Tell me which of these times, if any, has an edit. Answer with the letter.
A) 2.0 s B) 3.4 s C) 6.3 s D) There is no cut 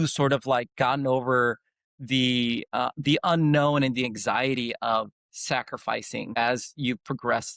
C